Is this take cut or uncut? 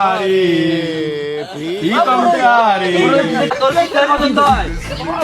cut